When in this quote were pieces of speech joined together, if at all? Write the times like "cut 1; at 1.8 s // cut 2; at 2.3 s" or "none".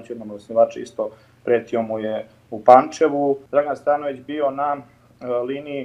cut 1; at 3.4 s